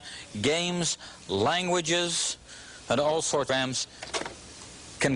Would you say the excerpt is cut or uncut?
uncut